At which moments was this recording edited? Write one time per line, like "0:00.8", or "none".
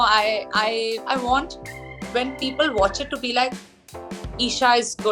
0:01.0